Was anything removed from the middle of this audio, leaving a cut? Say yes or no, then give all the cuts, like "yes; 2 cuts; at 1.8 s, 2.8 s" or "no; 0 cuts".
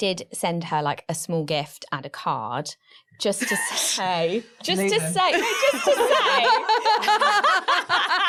no; 0 cuts